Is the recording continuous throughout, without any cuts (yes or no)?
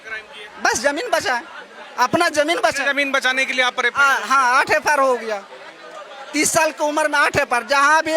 yes